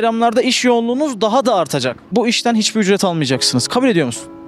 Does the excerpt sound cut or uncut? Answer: cut